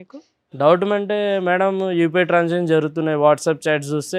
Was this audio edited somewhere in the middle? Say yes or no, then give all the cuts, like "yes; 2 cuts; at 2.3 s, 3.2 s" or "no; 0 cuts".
no; 0 cuts